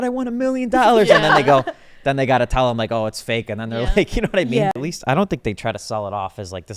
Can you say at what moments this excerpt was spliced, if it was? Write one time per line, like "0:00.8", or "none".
0:04.8